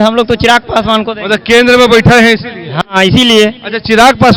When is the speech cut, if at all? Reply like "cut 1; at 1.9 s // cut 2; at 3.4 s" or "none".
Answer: none